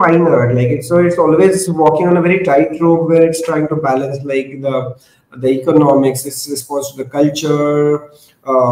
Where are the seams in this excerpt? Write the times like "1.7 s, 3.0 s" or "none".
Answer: none